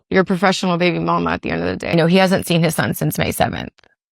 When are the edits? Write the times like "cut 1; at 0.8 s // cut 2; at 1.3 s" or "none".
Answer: cut 1; at 1.8 s